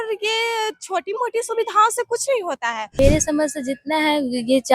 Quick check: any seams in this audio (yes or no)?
yes